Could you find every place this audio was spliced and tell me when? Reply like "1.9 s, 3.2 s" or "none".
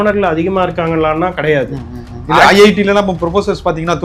none